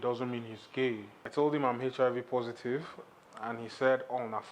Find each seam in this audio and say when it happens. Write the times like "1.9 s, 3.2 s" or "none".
1.2 s